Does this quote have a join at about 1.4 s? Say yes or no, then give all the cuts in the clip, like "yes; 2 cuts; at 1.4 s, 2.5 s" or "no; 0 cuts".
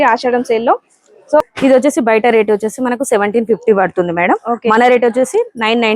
yes; 1 cut; at 1.4 s